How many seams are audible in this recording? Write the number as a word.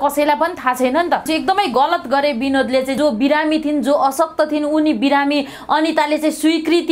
two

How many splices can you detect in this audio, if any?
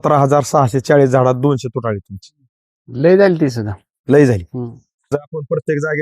one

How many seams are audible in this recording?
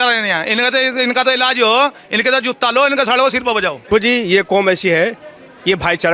one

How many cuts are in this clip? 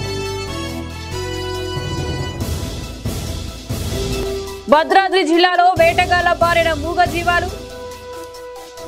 zero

